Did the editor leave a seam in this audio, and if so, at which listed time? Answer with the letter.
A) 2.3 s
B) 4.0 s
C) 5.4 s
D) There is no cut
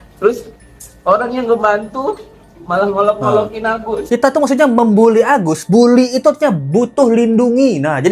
B